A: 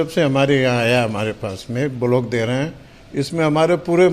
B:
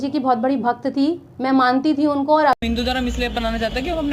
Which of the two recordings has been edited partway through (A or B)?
B